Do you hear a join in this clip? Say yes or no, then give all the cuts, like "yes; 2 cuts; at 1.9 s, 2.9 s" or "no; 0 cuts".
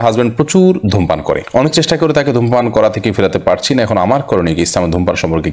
no; 0 cuts